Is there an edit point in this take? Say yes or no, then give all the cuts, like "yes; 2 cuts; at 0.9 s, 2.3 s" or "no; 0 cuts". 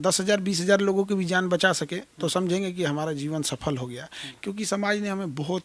no; 0 cuts